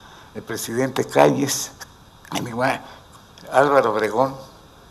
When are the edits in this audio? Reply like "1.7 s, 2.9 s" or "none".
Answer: none